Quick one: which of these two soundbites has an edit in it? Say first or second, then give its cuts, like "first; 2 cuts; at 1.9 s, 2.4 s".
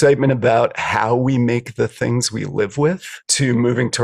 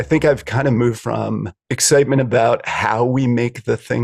second; 1 cut; at 1.0 s